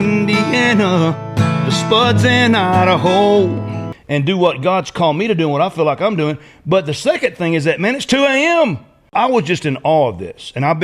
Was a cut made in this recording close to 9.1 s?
yes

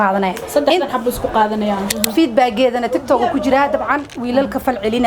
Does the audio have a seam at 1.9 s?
yes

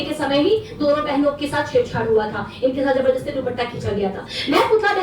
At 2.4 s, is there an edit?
no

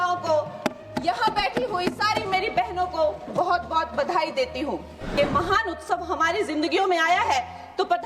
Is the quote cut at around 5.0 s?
yes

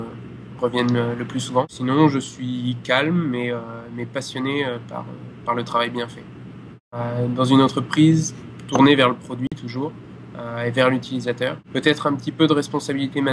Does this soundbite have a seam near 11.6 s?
yes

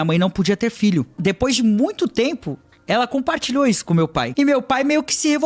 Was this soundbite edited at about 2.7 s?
no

